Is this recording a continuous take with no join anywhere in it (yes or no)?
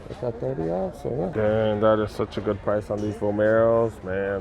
no